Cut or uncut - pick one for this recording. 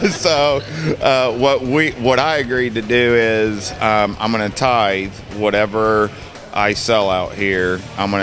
uncut